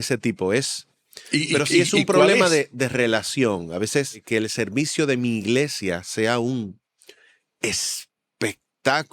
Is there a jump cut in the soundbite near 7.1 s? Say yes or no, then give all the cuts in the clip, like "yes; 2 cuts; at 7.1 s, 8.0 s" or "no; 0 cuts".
no; 1 cut; at 4.2 s